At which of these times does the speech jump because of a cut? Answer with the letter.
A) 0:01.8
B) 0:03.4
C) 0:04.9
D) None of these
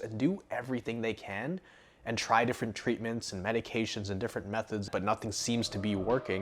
C